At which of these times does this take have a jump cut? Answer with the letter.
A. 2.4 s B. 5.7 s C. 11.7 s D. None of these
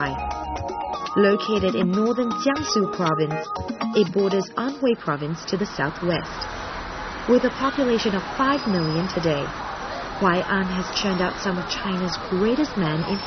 C